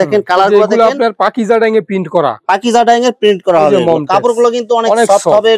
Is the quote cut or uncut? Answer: uncut